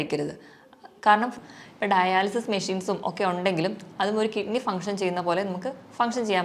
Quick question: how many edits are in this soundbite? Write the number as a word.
one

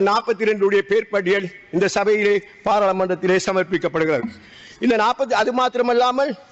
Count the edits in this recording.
zero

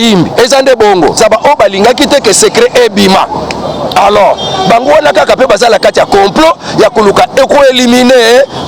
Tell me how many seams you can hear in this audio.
one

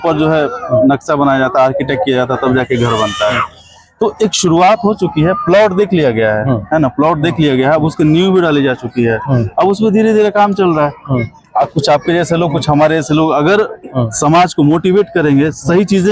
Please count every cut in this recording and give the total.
zero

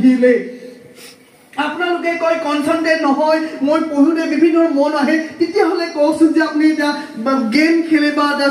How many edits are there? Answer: zero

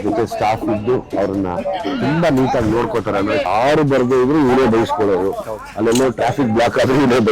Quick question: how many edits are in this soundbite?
one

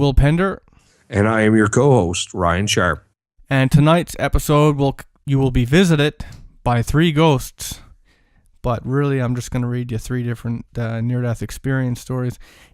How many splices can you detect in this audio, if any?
one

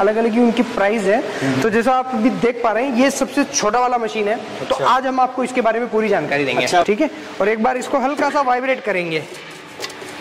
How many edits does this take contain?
one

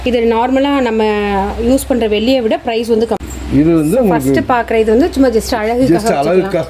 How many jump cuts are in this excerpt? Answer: one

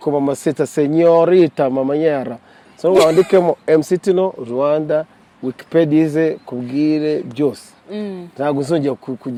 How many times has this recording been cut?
zero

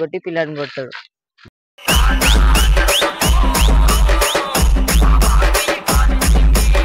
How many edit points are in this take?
one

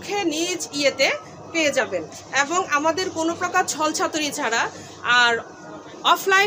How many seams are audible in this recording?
zero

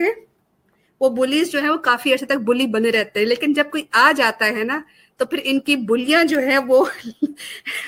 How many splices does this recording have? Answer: zero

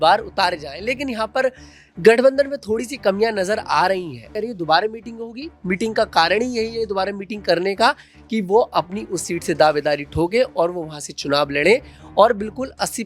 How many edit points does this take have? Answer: one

